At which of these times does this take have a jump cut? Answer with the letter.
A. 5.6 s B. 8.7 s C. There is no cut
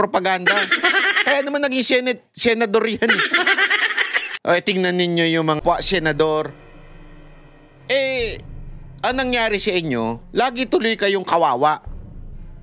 A